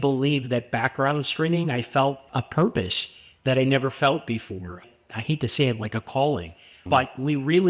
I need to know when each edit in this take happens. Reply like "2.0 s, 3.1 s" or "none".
2.2 s, 4.8 s